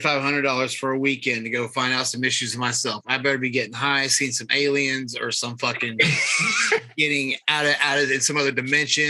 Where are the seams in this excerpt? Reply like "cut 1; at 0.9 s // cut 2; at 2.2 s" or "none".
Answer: none